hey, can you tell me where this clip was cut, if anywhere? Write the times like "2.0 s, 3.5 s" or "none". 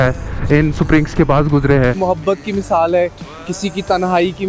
2.0 s